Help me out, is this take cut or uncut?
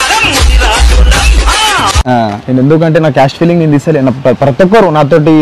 uncut